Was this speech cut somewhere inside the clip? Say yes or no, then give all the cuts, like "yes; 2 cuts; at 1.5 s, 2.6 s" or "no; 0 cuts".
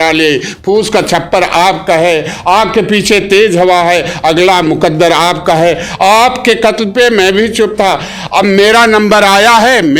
no; 0 cuts